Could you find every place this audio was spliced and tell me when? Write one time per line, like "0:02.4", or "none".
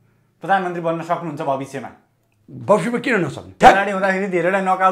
0:03.5